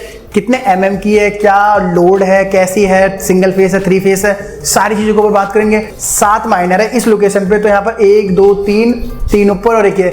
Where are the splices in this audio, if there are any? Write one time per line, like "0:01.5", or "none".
0:05.9

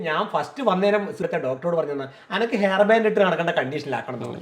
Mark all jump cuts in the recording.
0:01.2

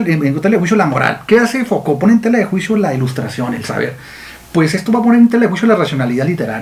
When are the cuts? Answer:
none

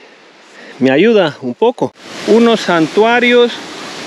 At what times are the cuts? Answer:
0:02.1

